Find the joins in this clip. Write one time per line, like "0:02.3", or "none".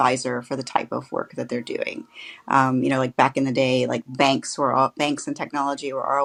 none